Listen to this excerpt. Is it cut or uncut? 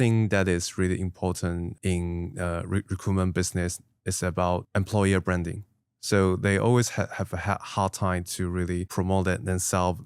cut